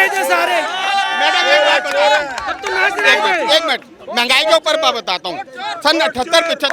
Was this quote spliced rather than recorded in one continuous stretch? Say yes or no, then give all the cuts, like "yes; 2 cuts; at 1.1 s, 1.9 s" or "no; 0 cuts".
no; 0 cuts